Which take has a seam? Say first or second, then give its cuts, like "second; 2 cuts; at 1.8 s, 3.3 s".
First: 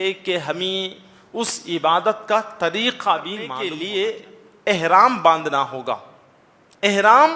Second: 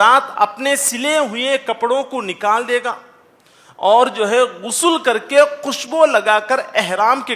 first; 1 cut; at 3.6 s